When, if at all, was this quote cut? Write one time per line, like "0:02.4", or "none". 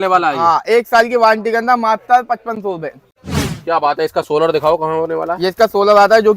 0:03.2

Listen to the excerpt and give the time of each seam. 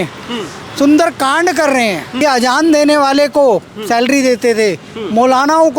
0:02.2

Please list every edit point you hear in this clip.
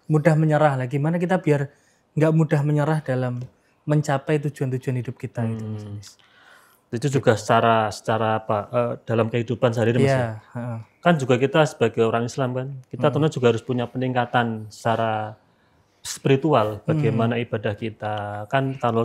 none

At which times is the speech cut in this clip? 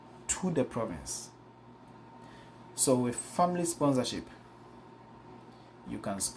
0:01.5

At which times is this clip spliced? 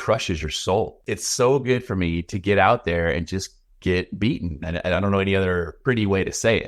0:01.0
0:05.7

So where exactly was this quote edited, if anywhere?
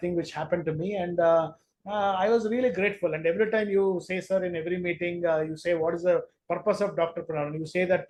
none

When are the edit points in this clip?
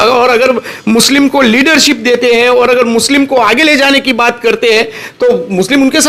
none

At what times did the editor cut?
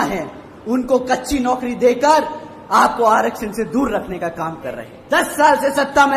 0:04.9

